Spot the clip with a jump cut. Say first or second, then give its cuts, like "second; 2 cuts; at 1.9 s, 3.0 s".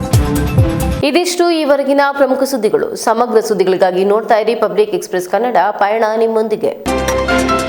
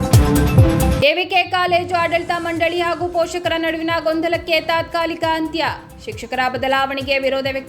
second; 1 cut; at 1.0 s